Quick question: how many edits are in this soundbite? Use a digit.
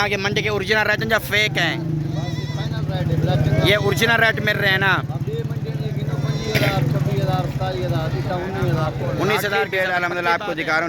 1